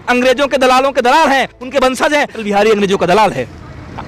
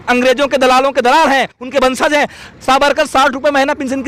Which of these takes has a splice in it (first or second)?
first